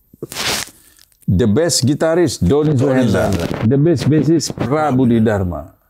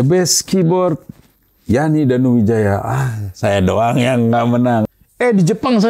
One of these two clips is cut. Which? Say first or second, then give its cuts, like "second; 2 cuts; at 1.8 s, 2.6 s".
second; 1 cut; at 4.9 s